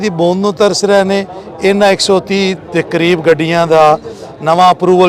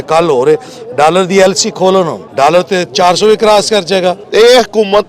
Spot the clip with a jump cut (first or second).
second